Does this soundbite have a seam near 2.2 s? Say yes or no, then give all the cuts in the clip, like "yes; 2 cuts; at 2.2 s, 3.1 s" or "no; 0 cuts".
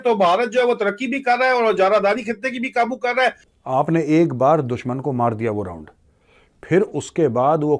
no; 1 cut; at 3.5 s